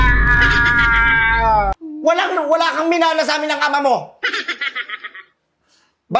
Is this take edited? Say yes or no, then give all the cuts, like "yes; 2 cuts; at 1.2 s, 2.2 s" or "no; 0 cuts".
yes; 1 cut; at 1.8 s